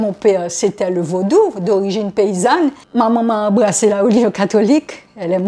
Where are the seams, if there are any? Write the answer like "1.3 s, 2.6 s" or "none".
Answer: 2.8 s